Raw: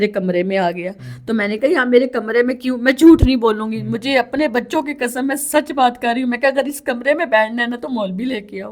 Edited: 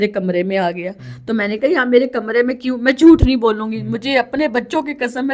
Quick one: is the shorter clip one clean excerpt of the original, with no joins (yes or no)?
yes